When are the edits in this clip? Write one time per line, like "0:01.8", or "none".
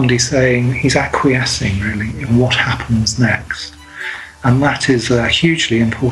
none